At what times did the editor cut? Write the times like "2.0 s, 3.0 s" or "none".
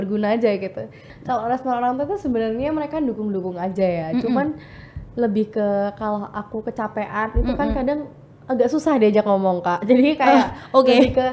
1.0 s